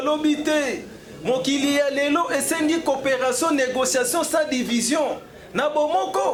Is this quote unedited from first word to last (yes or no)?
yes